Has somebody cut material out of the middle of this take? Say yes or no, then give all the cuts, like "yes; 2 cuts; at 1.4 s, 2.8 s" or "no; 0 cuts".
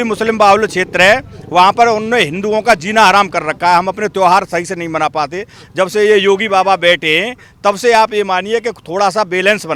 no; 0 cuts